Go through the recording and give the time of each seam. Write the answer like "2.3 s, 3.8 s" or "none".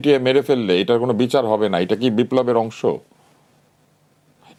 none